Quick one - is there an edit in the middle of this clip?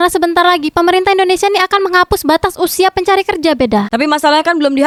no; 0 cuts

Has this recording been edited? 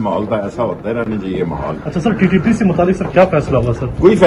no; 0 cuts

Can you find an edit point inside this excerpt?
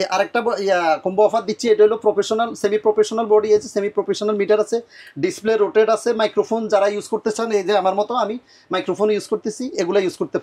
no; 0 cuts

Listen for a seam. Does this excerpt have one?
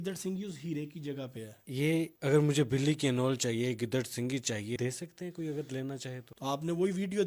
yes; 3 cuts; at 1.7 s, 4.8 s, 6.3 s

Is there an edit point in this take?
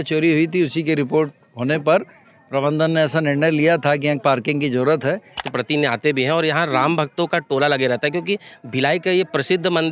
yes; 1 cut; at 5.5 s

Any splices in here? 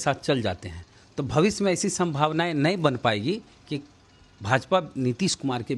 no; 0 cuts

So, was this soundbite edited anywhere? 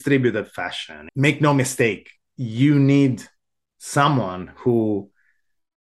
yes; 1 cut; at 1.1 s

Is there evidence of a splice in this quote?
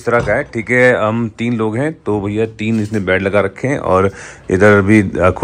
no; 0 cuts

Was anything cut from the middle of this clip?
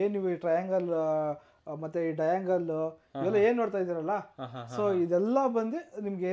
no; 0 cuts

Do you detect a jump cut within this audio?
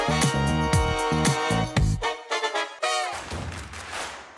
yes; 1 cut; at 3.2 s

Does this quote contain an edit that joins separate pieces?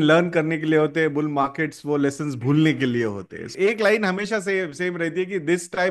yes; 1 cut; at 3.5 s

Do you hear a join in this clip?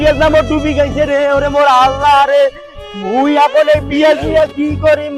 no; 0 cuts

